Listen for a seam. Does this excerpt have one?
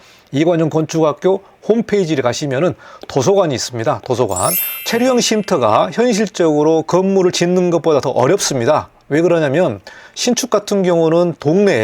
yes; 1 cut; at 4.7 s

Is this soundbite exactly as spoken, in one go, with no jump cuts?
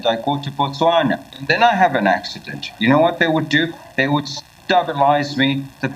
no; 1 cut; at 1.3 s

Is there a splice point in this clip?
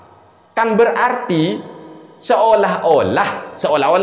no; 0 cuts

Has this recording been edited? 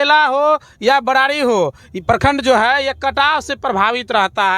no; 0 cuts

